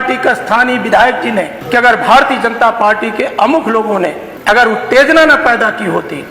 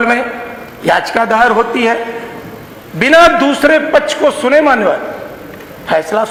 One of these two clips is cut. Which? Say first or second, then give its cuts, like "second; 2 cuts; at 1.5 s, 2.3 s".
first; 2 cuts; at 1.6 s, 4.3 s